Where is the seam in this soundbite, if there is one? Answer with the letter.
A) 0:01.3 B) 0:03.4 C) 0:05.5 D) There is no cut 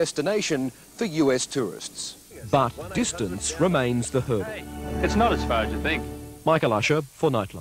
A